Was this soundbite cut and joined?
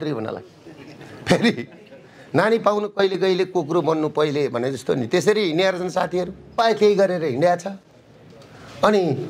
yes; 1 cut; at 6.4 s

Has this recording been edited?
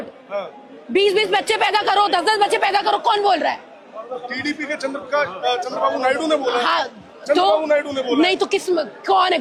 no; 0 cuts

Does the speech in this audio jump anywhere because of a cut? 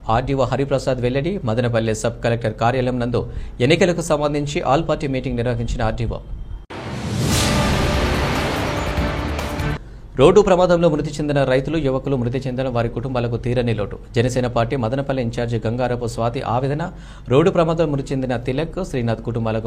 no; 0 cuts

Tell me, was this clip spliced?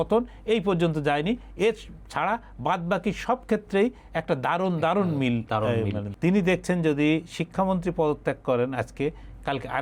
yes; 1 cut; at 6.0 s

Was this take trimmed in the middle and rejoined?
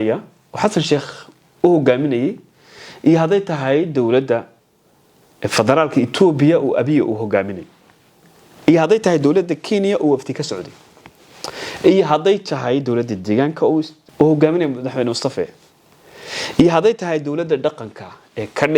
yes; 1 cut; at 14.0 s

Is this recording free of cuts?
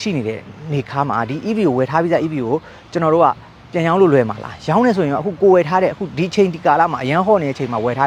yes; 0 cuts

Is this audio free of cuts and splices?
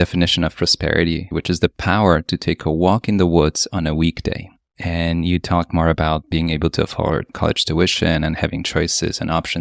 no; 3 cuts; at 1.3 s, 6.3 s, 7.3 s

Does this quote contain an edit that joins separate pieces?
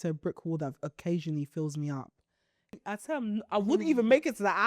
yes; 1 cut; at 2.8 s

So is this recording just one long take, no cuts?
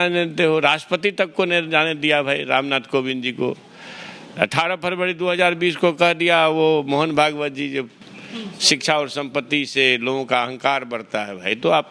yes; 0 cuts

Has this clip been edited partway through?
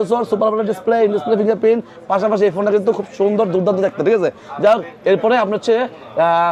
no; 0 cuts

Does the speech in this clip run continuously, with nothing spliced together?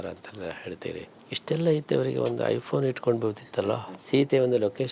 no; 2 cuts; at 1.2 s, 3.9 s

